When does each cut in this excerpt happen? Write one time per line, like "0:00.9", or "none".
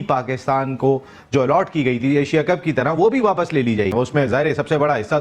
0:03.9